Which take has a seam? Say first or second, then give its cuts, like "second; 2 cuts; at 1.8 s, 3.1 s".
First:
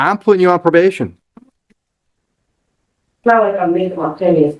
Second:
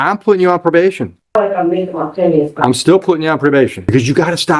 second; 2 cuts; at 1.3 s, 3.9 s